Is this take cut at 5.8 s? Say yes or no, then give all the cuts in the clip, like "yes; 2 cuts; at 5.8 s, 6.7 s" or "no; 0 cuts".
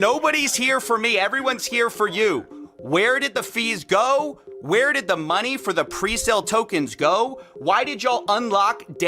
no; 1 cut; at 2.5 s